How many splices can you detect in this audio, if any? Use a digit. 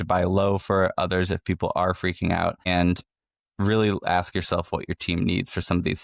0